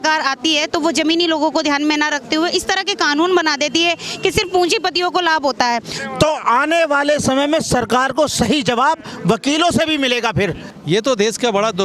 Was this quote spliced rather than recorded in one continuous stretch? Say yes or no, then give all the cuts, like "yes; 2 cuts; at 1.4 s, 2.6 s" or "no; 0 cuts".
yes; 2 cuts; at 5.9 s, 10.7 s